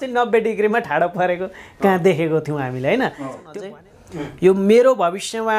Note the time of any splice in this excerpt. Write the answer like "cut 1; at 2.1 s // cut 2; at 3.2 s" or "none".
cut 1; at 3.4 s

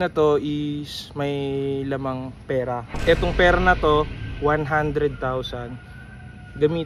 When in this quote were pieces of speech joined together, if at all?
cut 1; at 2.9 s

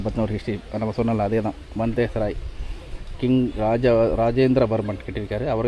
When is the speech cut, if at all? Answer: none

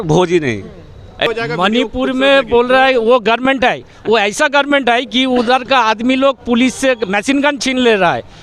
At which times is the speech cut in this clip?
cut 1; at 1.3 s

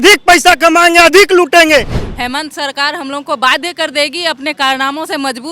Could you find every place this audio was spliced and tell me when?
cut 1; at 2.0 s

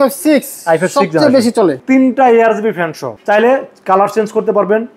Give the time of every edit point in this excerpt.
cut 1; at 1.8 s // cut 2; at 3.1 s

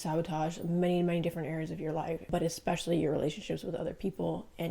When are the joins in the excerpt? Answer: cut 1; at 2.3 s

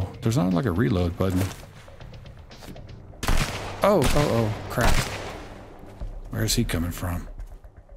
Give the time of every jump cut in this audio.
none

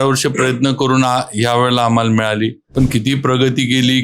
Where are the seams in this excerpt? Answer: cut 1; at 2.6 s

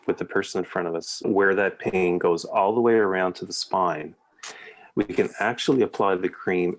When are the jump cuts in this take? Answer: cut 1; at 1.2 s

